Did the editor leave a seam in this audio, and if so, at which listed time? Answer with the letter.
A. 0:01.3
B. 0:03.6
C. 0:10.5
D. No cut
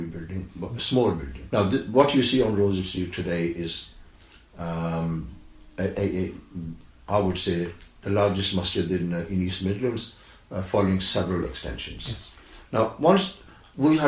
A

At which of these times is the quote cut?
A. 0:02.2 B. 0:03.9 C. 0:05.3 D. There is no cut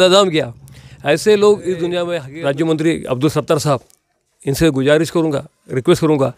A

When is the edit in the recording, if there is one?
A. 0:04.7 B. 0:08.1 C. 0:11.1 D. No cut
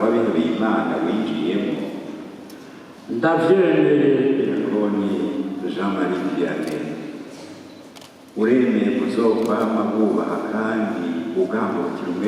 A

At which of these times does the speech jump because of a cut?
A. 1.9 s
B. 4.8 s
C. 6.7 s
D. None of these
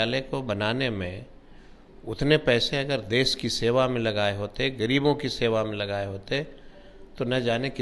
D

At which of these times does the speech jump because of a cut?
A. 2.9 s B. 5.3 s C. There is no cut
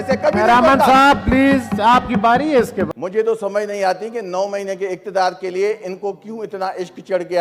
A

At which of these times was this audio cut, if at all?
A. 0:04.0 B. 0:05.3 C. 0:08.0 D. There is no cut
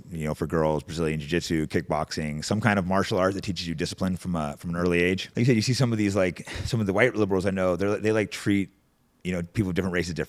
B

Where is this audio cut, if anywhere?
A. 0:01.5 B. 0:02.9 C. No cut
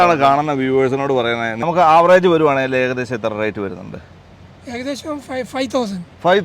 A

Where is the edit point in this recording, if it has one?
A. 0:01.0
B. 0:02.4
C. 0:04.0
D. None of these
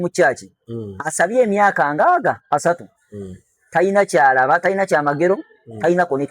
B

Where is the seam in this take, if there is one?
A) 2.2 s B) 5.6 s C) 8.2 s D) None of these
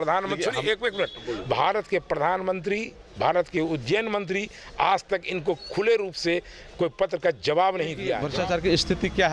C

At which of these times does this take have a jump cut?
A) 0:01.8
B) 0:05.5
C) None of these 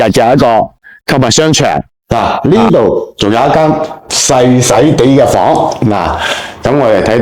A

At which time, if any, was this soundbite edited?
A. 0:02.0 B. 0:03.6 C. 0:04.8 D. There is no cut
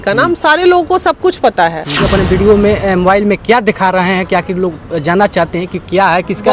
A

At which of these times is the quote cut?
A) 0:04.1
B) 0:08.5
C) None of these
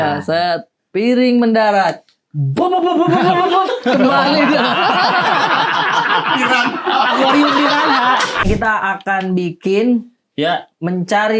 B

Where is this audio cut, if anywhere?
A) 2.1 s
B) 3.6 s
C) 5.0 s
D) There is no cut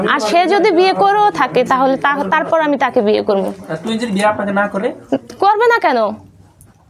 D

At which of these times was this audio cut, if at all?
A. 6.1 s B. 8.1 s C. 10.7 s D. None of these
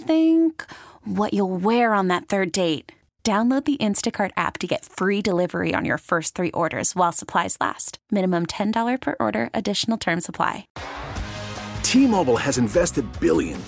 C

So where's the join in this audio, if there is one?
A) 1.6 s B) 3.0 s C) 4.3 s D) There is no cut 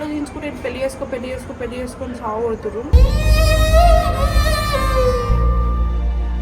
D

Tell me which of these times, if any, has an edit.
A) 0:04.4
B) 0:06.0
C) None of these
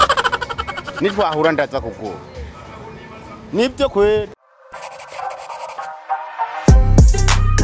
A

